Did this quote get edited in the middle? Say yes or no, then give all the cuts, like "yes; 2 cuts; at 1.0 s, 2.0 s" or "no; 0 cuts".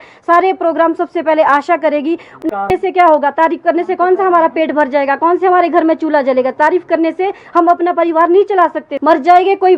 yes; 2 cuts; at 2.4 s, 8.9 s